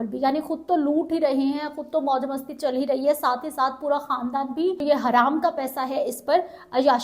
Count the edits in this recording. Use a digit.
1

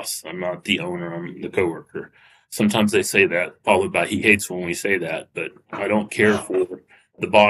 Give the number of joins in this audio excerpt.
1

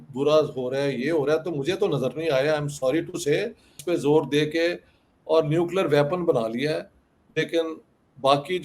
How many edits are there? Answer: 1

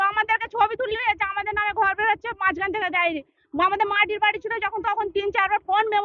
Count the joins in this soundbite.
0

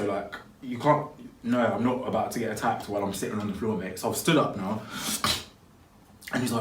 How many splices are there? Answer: 0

